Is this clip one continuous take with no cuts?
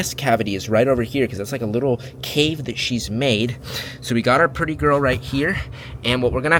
yes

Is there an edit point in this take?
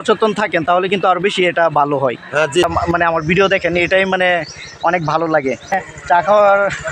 yes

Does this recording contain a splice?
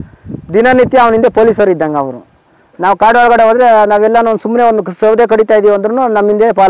no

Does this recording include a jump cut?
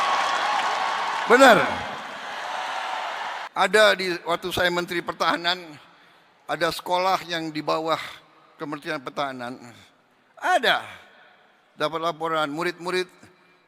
yes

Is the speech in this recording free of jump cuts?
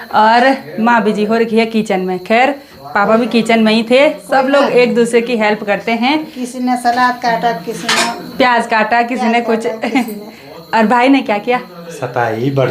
yes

